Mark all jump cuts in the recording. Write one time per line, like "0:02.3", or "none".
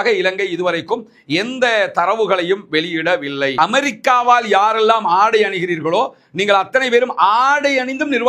0:03.5